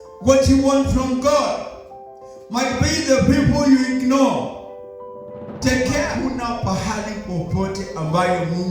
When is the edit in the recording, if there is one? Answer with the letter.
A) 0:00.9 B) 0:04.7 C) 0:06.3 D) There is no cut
C